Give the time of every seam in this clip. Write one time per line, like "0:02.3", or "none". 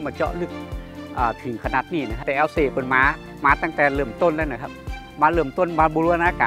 0:02.2